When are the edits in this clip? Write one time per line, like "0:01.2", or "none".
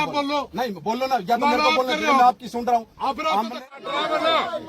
0:03.5